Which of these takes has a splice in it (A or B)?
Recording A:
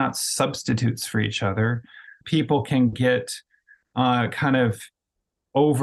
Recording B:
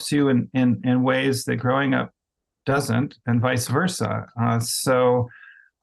A